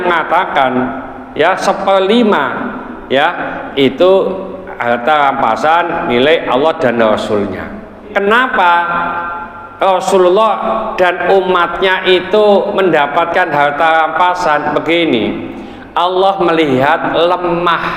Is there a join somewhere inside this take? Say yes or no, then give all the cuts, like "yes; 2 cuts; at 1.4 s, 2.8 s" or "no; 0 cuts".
yes; 1 cut; at 8.0 s